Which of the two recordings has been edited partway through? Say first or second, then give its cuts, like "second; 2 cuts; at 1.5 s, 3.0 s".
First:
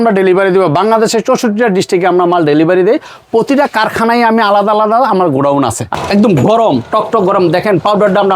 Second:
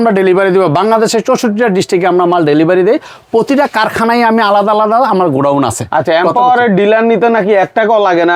first; 1 cut; at 5.9 s